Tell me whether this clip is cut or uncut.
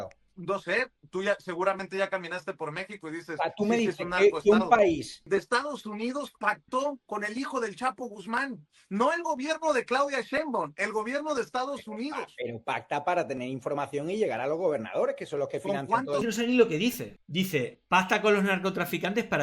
cut